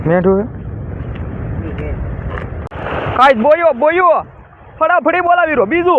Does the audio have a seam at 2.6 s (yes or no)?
yes